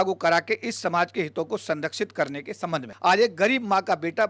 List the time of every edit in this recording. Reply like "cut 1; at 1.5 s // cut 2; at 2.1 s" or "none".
cut 1; at 2.9 s